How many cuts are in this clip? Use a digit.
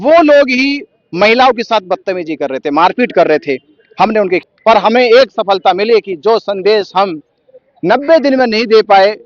1